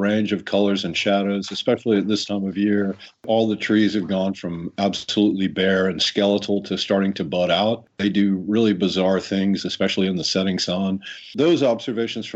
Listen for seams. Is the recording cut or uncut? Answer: cut